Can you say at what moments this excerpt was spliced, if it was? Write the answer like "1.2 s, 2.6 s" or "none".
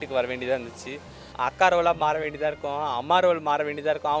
1.3 s

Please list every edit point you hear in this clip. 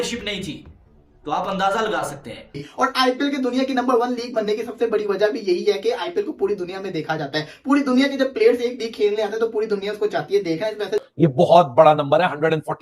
2.6 s, 11.1 s

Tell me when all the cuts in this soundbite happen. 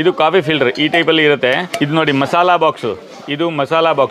1.7 s

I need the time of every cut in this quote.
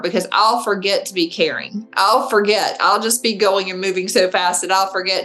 none

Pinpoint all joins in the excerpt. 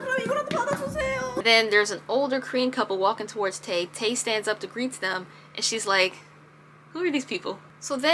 1.4 s

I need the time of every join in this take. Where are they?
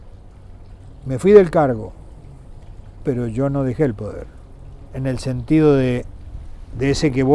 4.9 s

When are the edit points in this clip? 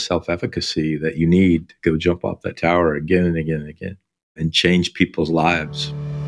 none

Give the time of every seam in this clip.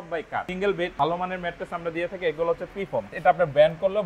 0.8 s, 3.1 s

